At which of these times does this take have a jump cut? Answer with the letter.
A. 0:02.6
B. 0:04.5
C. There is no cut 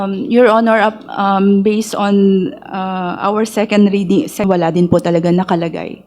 B